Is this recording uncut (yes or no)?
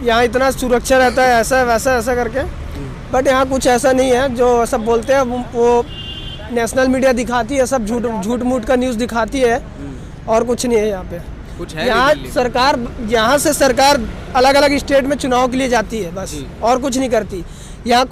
yes